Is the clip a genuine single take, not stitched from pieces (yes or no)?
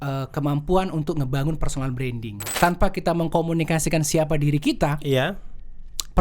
no